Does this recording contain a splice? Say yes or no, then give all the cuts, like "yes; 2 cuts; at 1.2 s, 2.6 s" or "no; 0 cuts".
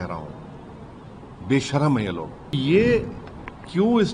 yes; 1 cut; at 2.6 s